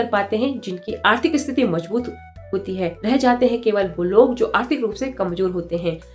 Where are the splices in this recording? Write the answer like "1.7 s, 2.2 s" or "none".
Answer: none